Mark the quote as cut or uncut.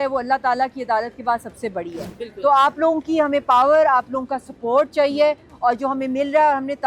uncut